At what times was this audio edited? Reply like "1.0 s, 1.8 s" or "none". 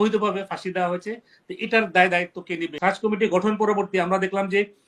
2.7 s